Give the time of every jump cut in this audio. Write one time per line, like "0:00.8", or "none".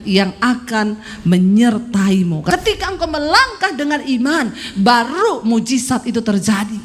0:02.5